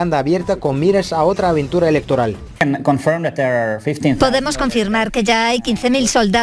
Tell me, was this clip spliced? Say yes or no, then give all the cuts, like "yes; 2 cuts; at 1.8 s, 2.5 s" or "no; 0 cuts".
yes; 1 cut; at 2.5 s